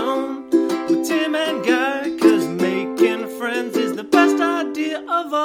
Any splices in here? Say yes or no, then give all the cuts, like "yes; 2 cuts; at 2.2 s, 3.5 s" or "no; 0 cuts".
no; 0 cuts